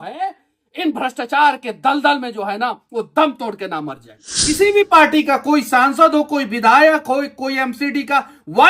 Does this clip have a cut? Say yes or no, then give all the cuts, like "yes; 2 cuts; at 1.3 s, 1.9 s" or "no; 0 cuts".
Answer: yes; 1 cut; at 4.5 s